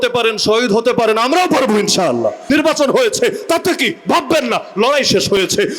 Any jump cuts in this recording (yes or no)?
yes